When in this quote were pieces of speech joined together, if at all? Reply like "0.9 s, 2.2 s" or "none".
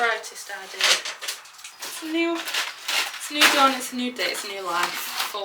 1.7 s